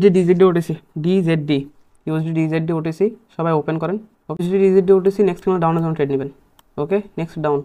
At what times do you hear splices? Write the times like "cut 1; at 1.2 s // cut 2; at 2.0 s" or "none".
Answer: cut 1; at 4.4 s